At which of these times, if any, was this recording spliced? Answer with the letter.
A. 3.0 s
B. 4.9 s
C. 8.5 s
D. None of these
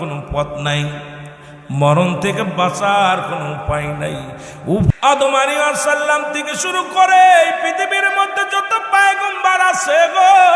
B